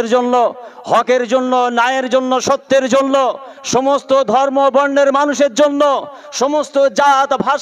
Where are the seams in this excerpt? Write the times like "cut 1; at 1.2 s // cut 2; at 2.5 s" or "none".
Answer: none